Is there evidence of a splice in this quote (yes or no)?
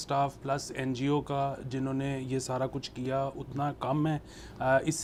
no